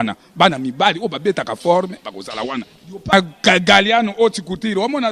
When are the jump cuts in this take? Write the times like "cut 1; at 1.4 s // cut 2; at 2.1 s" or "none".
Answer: cut 1; at 3.1 s